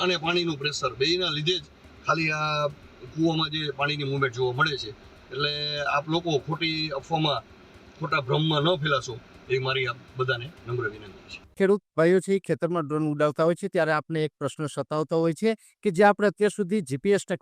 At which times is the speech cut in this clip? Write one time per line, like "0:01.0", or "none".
none

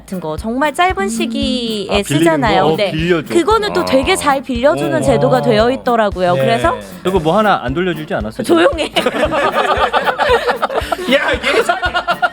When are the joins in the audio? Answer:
0:07.0

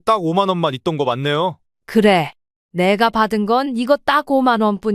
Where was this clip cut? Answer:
0:01.7

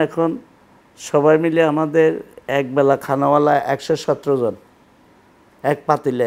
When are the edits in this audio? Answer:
none

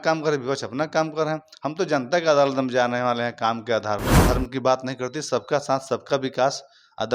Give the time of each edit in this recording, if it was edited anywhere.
0:04.1

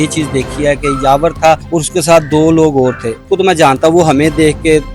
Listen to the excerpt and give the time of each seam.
0:01.7
0:03.2

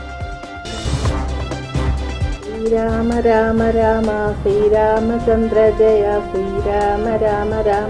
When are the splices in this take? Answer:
0:02.3

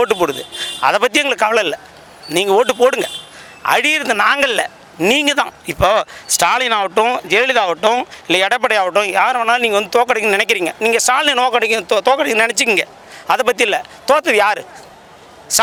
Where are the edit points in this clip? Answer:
none

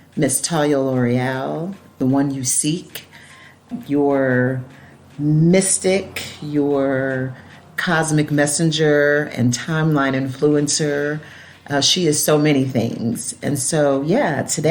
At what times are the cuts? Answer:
0:02.0
0:03.7

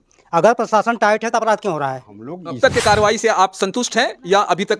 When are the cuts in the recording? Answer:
0:02.6

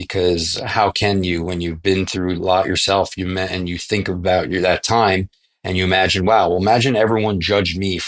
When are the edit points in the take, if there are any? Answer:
none

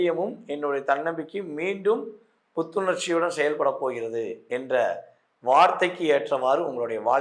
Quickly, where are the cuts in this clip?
none

